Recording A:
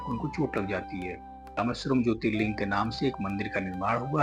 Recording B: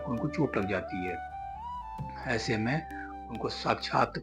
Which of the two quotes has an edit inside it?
A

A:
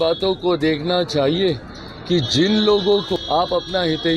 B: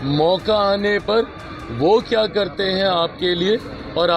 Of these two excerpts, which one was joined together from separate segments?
A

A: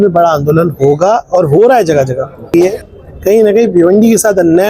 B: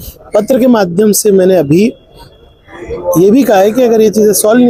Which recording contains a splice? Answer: A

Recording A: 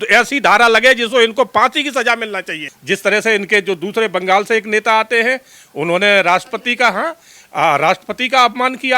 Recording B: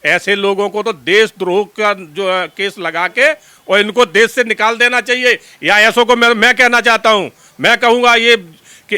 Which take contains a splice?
A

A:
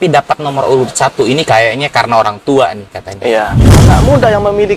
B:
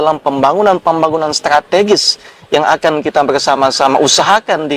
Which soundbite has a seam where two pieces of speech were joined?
A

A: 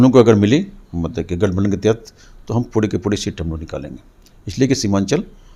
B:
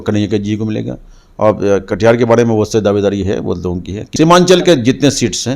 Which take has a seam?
B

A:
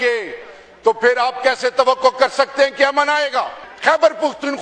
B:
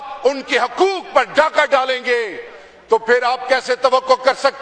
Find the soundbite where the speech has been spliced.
A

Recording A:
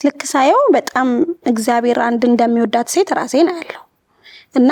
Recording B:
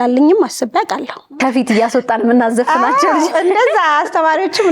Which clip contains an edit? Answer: B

